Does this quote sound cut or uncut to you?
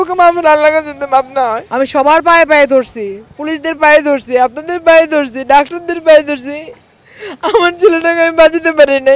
cut